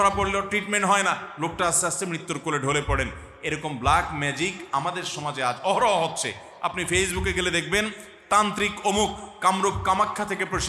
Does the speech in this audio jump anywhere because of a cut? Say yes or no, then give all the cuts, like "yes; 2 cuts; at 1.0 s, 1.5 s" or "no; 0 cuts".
no; 0 cuts